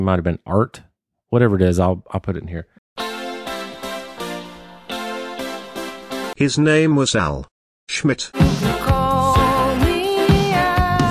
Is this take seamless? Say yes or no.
yes